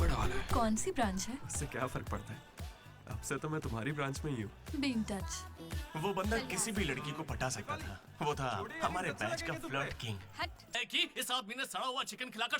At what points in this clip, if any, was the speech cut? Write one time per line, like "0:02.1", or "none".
0:10.8